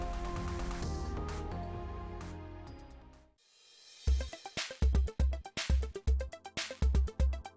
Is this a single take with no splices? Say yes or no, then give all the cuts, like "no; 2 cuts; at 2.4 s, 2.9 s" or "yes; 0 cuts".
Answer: no; 1 cut; at 3.3 s